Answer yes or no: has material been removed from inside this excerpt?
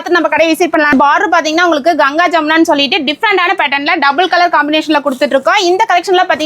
yes